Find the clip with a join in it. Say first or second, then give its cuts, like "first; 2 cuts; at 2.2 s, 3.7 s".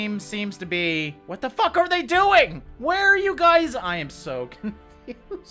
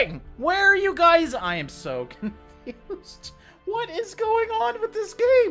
first; 1 cut; at 1.2 s